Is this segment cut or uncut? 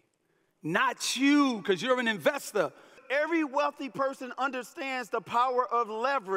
cut